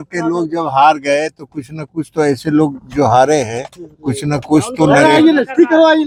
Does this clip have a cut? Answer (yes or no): no